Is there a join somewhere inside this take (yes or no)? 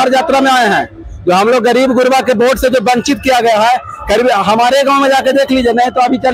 no